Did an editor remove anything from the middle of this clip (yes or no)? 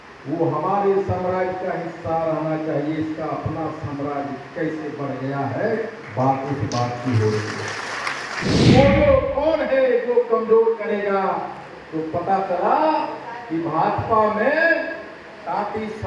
yes